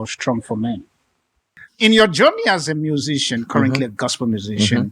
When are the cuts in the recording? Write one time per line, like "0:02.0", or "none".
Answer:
0:01.6